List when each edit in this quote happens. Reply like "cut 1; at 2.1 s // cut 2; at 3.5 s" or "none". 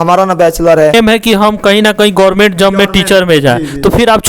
cut 1; at 0.9 s